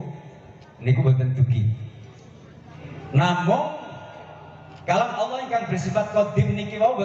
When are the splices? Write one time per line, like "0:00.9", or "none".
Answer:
0:02.7